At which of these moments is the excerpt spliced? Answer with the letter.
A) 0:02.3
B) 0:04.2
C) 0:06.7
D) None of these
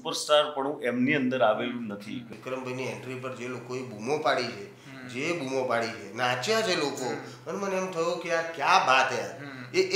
A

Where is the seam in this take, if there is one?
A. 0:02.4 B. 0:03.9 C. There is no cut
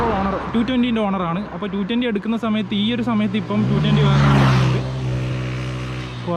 C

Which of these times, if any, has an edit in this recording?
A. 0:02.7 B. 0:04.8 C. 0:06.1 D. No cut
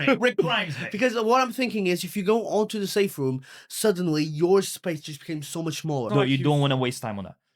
C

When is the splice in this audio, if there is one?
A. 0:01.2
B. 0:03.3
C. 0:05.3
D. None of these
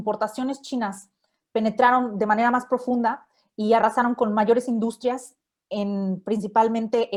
D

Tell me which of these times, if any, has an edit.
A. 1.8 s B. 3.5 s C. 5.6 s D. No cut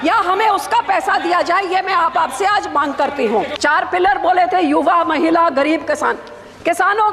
B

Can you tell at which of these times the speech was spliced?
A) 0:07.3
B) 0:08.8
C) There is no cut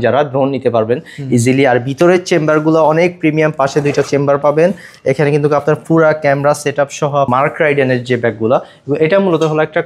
A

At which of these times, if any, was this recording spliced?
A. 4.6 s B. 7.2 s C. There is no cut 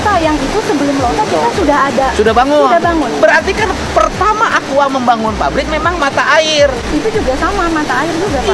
C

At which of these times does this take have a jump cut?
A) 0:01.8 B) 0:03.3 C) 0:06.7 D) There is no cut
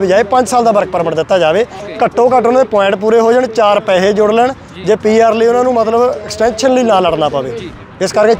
A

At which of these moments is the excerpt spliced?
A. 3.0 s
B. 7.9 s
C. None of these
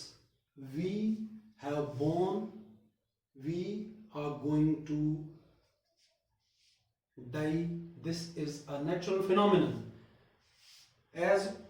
C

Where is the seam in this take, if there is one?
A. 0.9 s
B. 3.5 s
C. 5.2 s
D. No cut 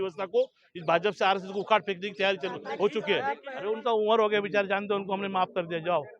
B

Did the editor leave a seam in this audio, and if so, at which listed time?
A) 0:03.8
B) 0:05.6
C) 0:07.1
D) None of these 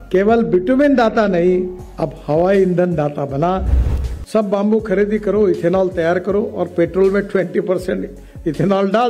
A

